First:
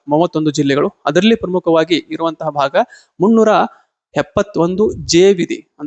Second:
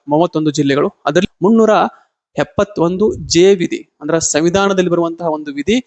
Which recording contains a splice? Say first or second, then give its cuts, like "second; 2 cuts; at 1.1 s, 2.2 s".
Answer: second; 1 cut; at 1.2 s